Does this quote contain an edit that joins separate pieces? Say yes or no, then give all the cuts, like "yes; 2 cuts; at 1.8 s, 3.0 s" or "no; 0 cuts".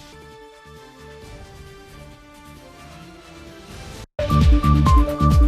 yes; 1 cut; at 4.1 s